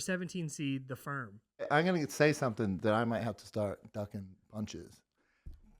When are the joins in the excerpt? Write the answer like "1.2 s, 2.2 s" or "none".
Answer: 1.7 s